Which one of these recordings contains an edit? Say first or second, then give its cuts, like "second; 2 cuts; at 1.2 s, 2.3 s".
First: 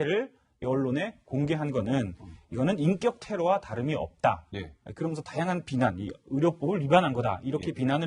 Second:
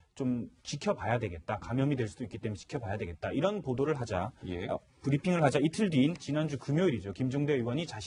first; 1 cut; at 5.2 s